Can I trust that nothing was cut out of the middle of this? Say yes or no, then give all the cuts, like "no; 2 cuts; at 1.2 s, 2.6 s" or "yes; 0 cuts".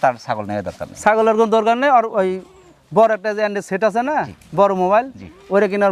yes; 0 cuts